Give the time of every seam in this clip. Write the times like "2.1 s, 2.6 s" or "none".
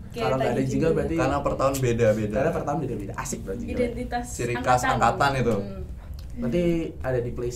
none